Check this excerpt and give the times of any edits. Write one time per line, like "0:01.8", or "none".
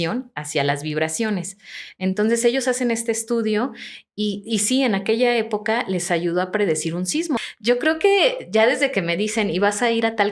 0:07.4